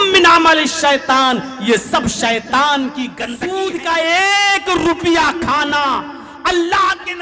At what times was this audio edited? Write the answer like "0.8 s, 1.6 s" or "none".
3.2 s